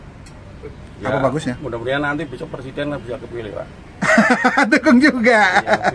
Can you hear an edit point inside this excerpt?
no; 0 cuts

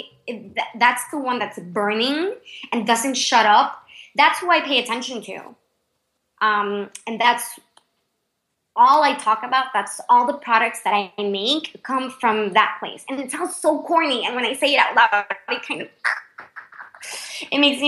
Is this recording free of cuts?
yes; 0 cuts

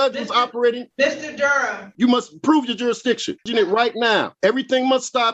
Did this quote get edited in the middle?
yes; 4 cuts; at 0.9 s, 1.9 s, 3.4 s, 4.3 s

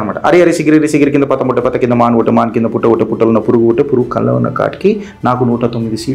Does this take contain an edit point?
no; 0 cuts

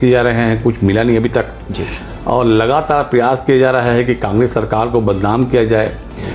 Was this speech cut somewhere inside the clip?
no; 0 cuts

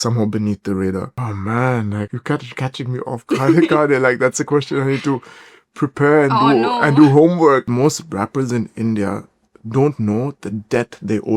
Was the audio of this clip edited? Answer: yes; 3 cuts; at 1.1 s, 2.2 s, 7.7 s

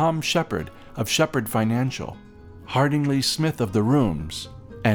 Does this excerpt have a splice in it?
no; 0 cuts

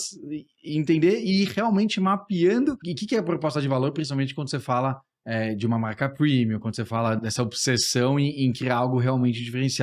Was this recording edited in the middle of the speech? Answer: yes; 2 cuts; at 2.9 s, 7.2 s

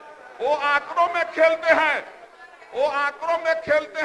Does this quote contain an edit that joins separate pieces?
no; 0 cuts

